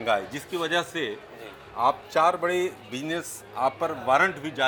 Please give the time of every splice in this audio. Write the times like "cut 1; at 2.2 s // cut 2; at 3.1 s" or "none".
none